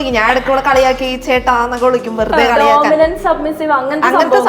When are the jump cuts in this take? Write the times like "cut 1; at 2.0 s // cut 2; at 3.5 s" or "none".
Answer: none